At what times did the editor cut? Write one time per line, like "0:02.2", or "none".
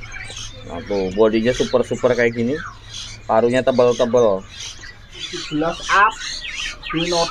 0:05.2